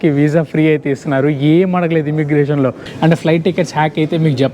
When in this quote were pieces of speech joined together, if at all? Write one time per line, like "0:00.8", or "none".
0:02.8